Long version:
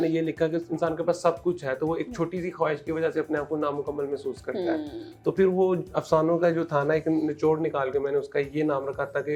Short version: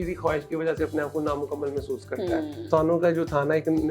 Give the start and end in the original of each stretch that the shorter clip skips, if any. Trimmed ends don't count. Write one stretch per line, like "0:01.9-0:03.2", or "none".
0:05.0-0:06.0